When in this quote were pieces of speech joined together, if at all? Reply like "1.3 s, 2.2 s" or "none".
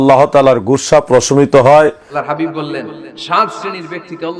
2.2 s